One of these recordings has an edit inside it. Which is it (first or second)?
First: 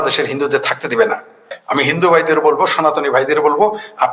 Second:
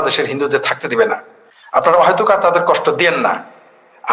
first